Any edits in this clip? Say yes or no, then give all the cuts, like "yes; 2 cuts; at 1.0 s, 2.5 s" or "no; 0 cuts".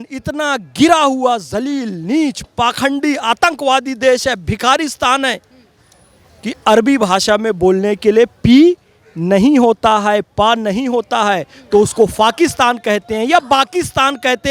no; 0 cuts